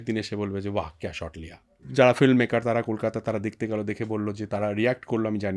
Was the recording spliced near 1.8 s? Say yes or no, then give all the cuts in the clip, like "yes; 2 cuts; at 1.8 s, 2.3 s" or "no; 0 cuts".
yes; 1 cut; at 1.8 s